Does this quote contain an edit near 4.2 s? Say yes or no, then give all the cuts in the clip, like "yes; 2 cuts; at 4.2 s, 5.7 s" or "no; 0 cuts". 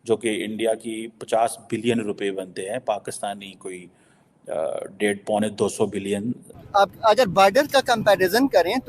no; 1 cut; at 6.6 s